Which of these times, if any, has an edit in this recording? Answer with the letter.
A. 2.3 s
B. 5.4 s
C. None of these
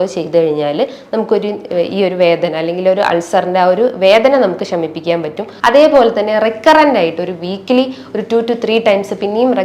B